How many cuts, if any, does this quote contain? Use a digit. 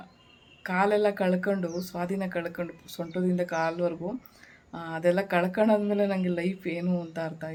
0